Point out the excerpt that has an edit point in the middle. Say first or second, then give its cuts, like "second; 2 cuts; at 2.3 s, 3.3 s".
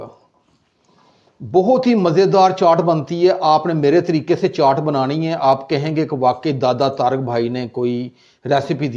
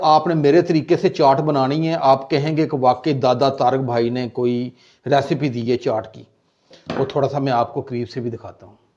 second; 1 cut; at 6.8 s